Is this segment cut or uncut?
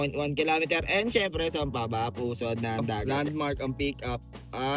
cut